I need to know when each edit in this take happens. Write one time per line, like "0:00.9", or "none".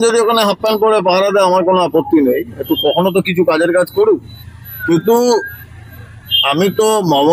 none